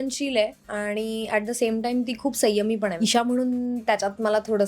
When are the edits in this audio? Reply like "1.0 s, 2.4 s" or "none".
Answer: 2.9 s